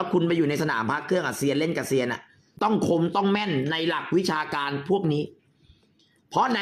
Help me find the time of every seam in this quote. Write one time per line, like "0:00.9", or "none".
0:02.6